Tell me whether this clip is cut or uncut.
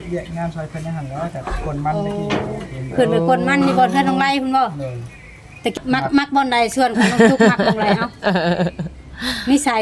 cut